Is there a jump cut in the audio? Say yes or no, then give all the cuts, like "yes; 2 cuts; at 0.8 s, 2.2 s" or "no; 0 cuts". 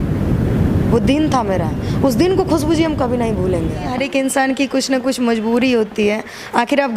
yes; 1 cut; at 3.9 s